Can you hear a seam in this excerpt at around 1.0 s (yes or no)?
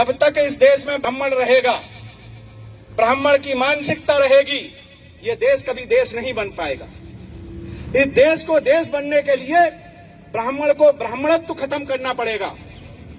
yes